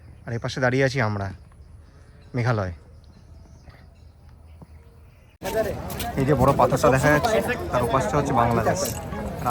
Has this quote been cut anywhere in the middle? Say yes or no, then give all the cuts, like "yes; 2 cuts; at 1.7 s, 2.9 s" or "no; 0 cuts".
yes; 1 cut; at 5.4 s